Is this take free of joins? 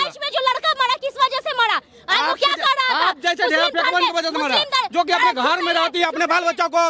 yes; 0 cuts

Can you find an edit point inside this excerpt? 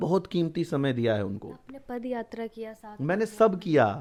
no; 0 cuts

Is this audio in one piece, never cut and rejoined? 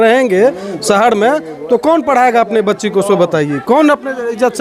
yes; 0 cuts

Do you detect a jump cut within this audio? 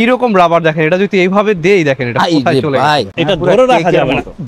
yes; 1 cut; at 3.1 s

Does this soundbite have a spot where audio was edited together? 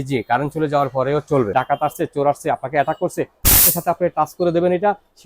yes; 1 cut; at 1.5 s

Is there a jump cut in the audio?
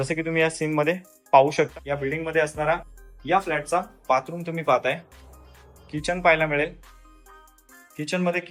yes; 2 cuts; at 1.7 s, 5.5 s

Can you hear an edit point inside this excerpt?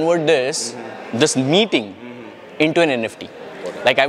no; 0 cuts

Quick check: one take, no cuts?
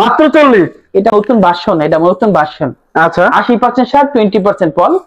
no; 1 cut; at 1.1 s

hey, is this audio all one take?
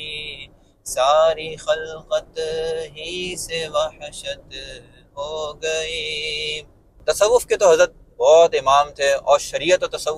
no; 1 cut; at 7.0 s

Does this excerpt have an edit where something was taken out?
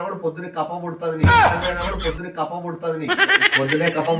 no; 0 cuts

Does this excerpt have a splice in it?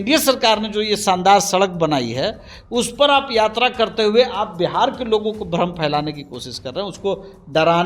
no; 0 cuts

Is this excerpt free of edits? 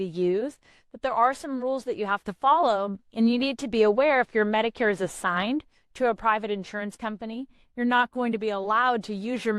yes; 0 cuts

